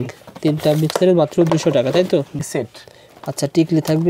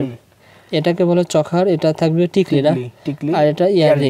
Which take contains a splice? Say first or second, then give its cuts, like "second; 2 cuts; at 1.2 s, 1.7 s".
first; 1 cut; at 2.5 s